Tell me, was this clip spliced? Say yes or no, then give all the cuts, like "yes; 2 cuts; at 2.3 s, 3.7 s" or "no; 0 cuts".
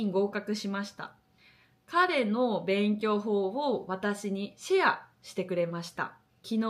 no; 0 cuts